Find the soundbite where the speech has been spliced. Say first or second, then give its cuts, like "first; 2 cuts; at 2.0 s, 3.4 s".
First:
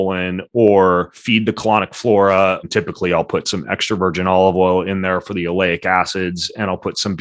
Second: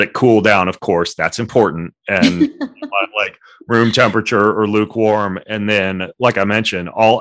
first; 2 cuts; at 1.2 s, 2.6 s